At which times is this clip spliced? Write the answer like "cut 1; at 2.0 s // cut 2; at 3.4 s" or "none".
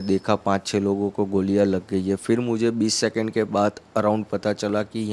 none